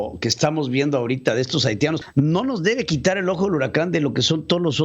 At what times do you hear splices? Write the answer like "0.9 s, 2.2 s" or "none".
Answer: 2.0 s